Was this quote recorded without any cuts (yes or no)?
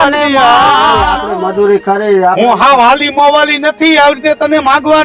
no